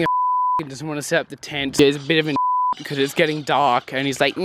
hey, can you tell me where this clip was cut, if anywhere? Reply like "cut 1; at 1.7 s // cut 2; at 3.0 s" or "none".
cut 1; at 1.6 s